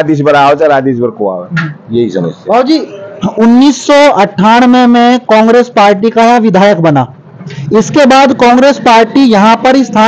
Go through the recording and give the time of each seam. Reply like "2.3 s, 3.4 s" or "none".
none